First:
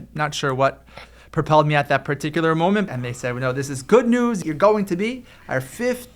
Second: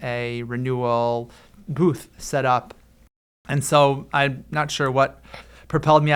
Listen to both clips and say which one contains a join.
first; 2 cuts; at 2.9 s, 4.4 s

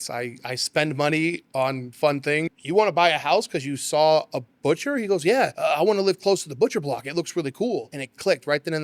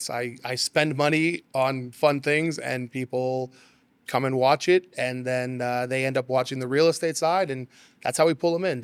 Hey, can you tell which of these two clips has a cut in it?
first; 2 cuts; at 2.5 s, 5.5 s

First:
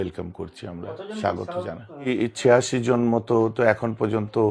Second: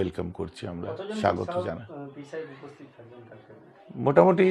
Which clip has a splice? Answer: first; 1 cut; at 2.1 s

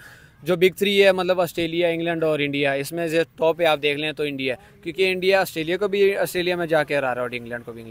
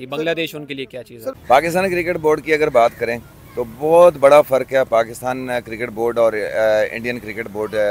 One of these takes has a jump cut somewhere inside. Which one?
second; 1 cut; at 1.4 s

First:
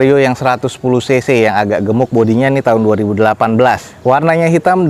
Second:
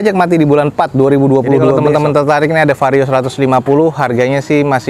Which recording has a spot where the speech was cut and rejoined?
second; 1 cut; at 1.7 s

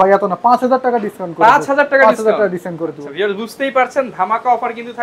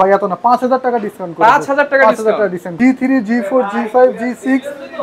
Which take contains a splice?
second; 1 cut; at 2.6 s

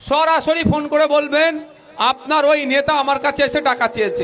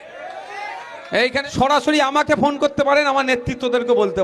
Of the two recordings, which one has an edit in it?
second; 1 cut; at 1.4 s

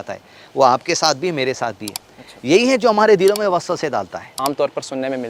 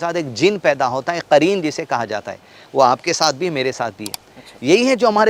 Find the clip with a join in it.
first; 1 cut; at 4.3 s

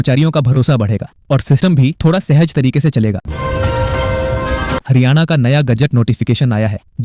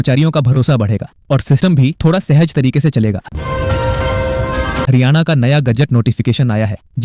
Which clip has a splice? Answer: first; 2 cuts; at 3.3 s, 4.9 s

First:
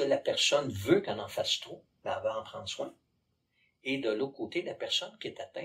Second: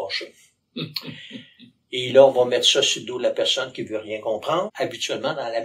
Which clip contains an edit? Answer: second; 1 cut; at 4.7 s

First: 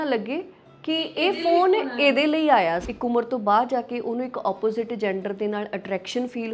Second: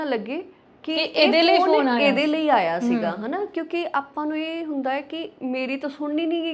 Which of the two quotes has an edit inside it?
first; 1 cut; at 2.8 s

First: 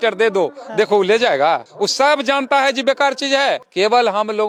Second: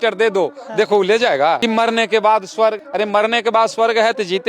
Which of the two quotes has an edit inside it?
second; 2 cuts; at 1.6 s, 2.8 s

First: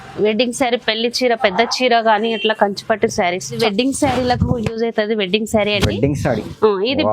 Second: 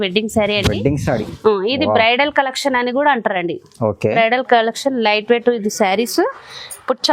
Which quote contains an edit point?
first; 1 cut; at 3.5 s

